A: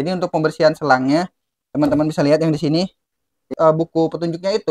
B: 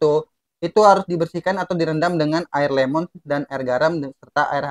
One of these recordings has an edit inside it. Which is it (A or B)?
A